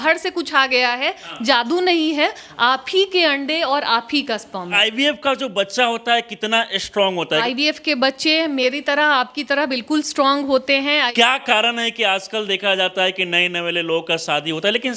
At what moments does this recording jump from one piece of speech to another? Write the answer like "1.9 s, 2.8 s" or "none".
4.8 s, 7.4 s, 11.1 s